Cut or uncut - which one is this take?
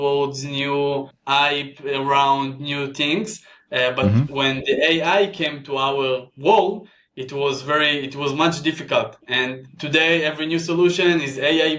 cut